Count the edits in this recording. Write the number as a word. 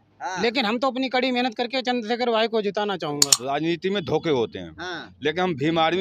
one